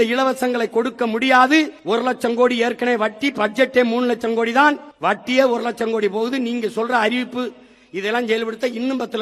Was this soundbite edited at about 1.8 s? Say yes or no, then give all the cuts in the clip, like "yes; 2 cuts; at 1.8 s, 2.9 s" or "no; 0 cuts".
yes; 2 cuts; at 1.8 s, 4.9 s